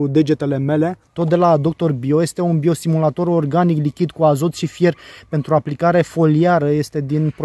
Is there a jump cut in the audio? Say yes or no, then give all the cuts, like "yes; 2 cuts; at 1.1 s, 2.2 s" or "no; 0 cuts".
yes; 1 cut; at 1.0 s